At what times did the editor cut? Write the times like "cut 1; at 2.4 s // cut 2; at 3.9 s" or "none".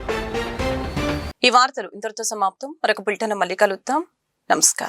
none